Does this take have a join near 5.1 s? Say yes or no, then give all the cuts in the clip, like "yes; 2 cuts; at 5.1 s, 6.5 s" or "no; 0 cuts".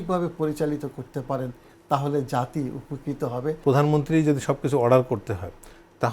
no; 1 cut; at 3.6 s